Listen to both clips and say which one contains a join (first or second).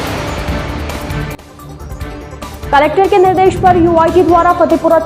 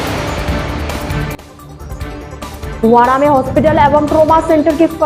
first